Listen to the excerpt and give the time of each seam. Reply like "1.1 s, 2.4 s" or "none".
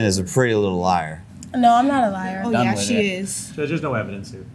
none